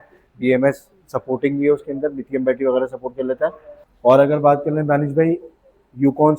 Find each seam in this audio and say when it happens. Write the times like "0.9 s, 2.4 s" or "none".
3.8 s